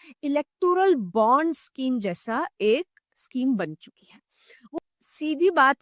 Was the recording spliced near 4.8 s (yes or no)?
yes